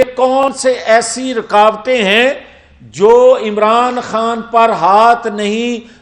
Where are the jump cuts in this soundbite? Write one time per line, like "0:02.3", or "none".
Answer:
none